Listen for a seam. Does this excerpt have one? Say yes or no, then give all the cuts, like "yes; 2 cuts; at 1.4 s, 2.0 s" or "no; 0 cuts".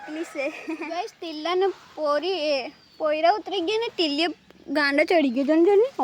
yes; 1 cut; at 1.2 s